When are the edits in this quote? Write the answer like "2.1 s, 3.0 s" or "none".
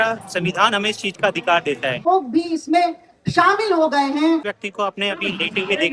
2.0 s, 4.5 s